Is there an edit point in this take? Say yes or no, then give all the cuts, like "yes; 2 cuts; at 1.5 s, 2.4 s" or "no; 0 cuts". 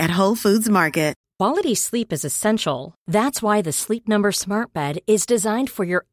yes; 1 cut; at 1.2 s